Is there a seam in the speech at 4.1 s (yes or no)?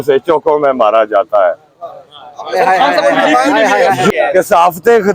yes